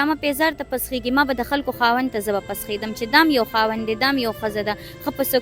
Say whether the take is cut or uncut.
uncut